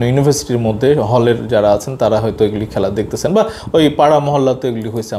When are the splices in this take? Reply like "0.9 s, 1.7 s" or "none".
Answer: none